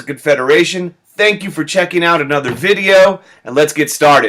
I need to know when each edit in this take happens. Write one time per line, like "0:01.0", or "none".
0:01.9

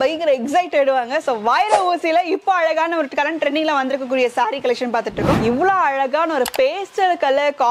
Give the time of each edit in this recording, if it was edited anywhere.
0:05.4

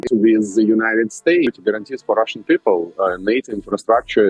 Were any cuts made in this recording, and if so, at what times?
0:01.5

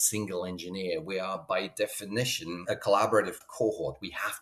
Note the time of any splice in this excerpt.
0:02.6
0:03.4

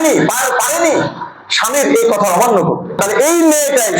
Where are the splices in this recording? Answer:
0:03.0

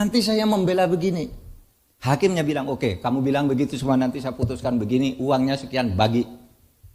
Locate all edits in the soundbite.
none

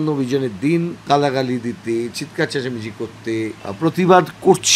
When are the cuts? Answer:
0:01.0
0:03.6

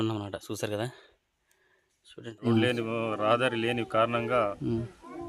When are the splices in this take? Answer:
0:02.5

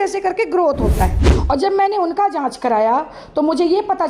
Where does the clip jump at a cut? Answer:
0:01.3

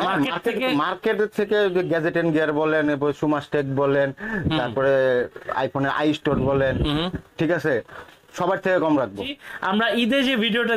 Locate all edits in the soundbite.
0:09.4

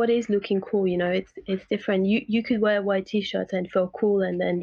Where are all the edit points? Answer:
none

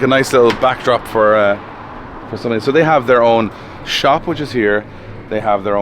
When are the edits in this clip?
none

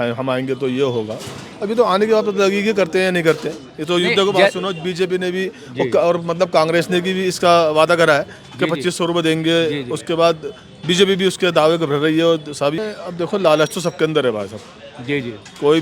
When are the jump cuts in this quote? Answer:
0:12.8

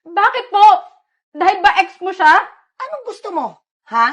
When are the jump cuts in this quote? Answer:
0:02.7

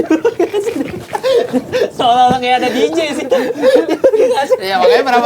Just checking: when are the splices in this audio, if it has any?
none

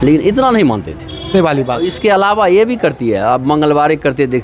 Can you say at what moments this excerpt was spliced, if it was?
0:01.3

